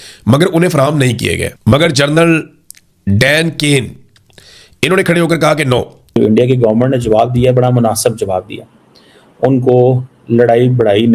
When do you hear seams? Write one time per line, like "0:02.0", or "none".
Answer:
0:01.5
0:06.1